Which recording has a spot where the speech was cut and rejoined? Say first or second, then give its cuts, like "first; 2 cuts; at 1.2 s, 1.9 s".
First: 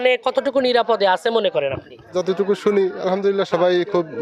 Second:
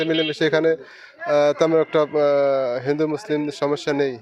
first; 1 cut; at 2.1 s